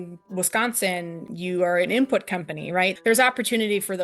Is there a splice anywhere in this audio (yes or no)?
yes